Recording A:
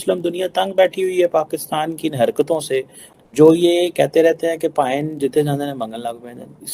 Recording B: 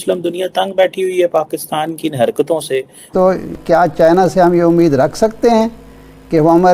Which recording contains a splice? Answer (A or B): B